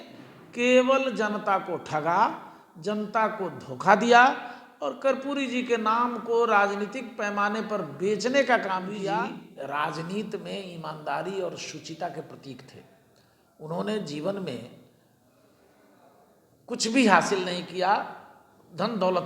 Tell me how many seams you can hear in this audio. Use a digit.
1